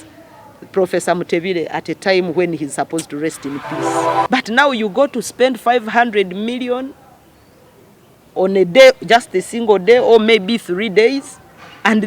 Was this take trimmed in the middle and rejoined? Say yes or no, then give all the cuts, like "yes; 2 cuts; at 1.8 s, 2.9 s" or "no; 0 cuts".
yes; 1 cut; at 4.0 s